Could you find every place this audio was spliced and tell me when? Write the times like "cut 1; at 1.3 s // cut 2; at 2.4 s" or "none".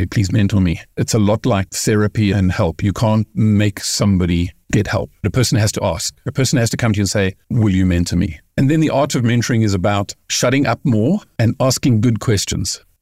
cut 1; at 5.2 s // cut 2; at 7.4 s // cut 3; at 8.4 s

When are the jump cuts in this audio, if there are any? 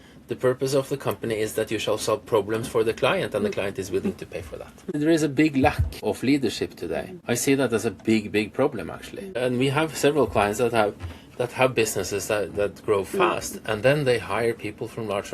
cut 1; at 4.9 s // cut 2; at 6.0 s // cut 3; at 7.1 s // cut 4; at 9.4 s

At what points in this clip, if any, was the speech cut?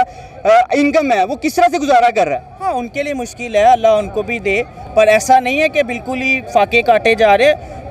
none

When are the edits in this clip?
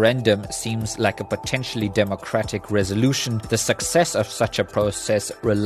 cut 1; at 3.3 s

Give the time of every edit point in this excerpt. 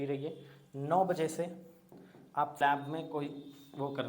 cut 1; at 2.6 s

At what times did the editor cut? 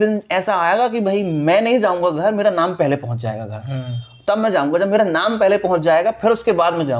none

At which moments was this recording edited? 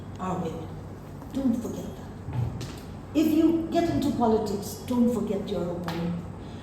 none

